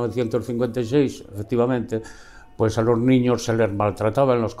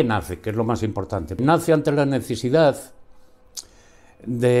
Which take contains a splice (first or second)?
second